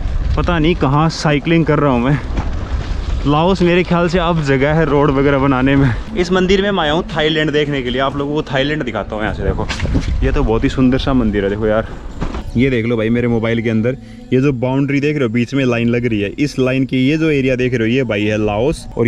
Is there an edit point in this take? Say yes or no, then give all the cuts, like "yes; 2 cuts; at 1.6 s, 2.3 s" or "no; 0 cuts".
yes; 2 cuts; at 6.0 s, 12.4 s